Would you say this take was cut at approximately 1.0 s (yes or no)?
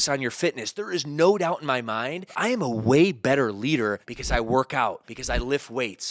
no